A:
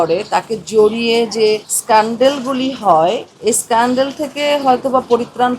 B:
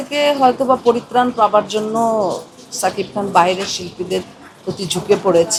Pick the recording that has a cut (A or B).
A